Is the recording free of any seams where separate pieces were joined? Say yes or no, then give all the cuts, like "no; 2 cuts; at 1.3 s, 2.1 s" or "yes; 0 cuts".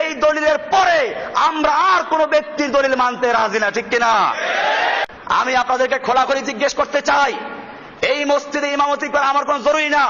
no; 1 cut; at 5.0 s